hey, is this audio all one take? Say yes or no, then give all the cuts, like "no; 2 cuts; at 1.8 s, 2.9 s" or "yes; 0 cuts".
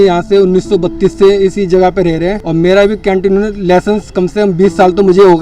yes; 0 cuts